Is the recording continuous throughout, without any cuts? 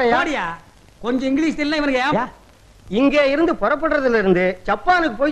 yes; 0 cuts

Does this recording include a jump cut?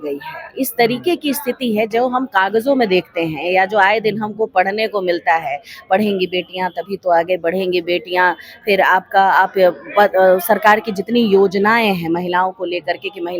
no; 0 cuts

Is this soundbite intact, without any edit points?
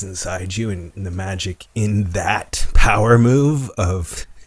yes; 0 cuts

